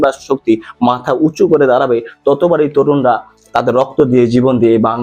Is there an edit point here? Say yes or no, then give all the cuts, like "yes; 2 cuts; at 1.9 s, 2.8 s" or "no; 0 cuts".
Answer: no; 0 cuts